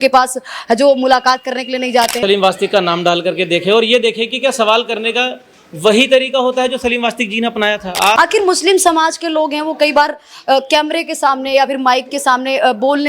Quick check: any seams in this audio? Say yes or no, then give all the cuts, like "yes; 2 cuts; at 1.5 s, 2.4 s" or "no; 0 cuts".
yes; 2 cuts; at 2.2 s, 8.2 s